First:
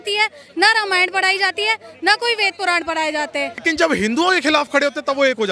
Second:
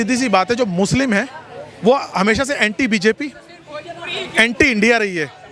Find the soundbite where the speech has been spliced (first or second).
first